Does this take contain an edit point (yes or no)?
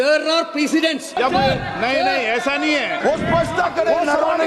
yes